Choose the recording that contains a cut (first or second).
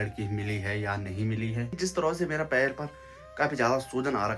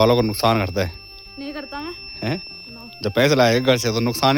first